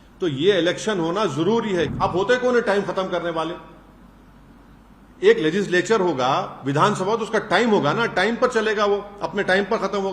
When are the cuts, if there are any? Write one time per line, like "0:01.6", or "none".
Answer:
0:01.9